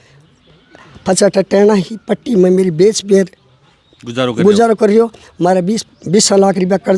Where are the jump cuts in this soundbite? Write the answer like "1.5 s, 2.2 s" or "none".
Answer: none